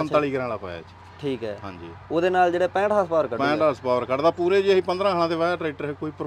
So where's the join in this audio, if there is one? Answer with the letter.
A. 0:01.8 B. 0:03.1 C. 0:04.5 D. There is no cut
D